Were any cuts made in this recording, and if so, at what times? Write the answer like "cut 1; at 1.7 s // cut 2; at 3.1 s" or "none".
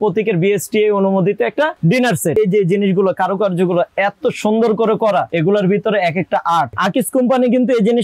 cut 1; at 2.4 s // cut 2; at 6.8 s